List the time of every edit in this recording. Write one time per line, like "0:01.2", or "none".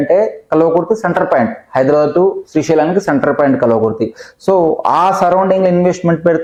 none